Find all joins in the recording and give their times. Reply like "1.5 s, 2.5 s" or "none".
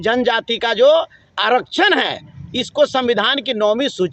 none

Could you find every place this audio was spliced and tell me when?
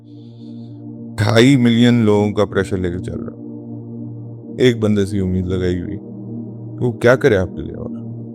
7.5 s

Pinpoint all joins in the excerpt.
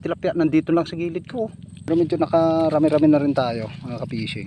1.7 s

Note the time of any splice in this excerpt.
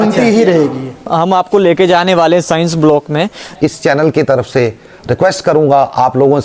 1.1 s, 3.4 s

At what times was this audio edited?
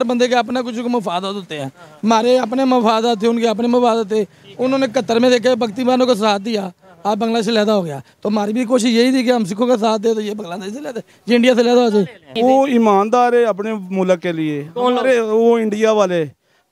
12.2 s

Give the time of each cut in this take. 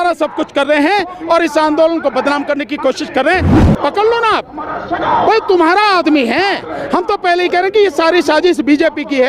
3.6 s

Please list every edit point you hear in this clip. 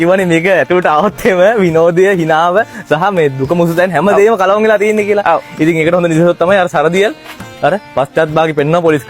none

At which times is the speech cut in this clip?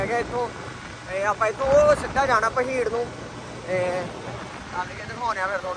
none

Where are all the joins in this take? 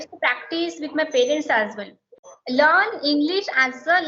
2.2 s

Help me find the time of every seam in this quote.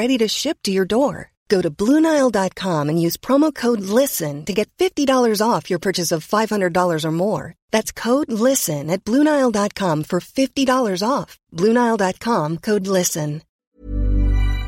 13.7 s

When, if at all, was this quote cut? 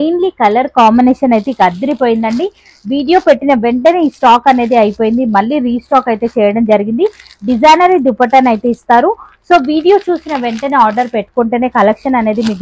none

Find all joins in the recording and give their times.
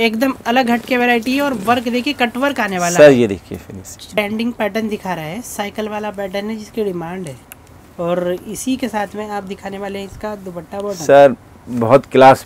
4.2 s

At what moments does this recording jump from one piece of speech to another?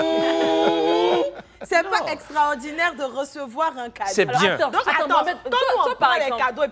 none

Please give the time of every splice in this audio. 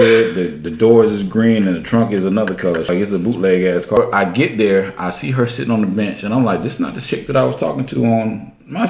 2.9 s, 4.0 s

